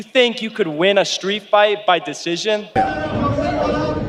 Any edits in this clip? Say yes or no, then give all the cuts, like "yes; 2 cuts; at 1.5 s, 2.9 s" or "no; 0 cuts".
no; 0 cuts